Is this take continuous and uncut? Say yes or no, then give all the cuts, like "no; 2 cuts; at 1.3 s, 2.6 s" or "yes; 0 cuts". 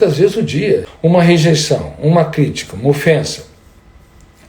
no; 1 cut; at 0.9 s